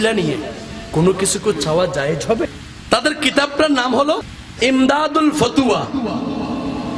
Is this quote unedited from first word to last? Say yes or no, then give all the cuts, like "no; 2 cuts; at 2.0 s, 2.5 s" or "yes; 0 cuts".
no; 2 cuts; at 2.5 s, 4.4 s